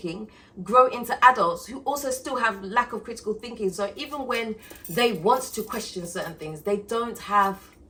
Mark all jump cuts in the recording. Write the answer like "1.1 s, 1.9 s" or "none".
none